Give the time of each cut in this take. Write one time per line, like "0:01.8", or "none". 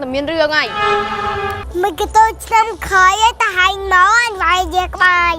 0:01.6

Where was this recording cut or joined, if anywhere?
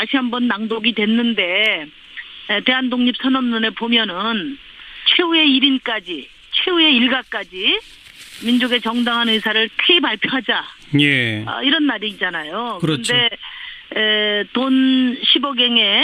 0:03.2

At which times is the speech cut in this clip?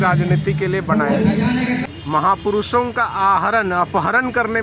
0:01.8

